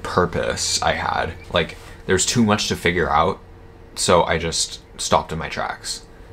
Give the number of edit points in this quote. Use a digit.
1